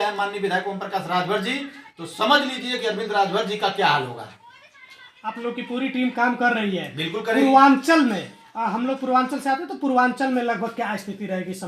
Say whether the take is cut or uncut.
uncut